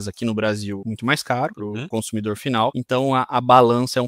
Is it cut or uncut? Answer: cut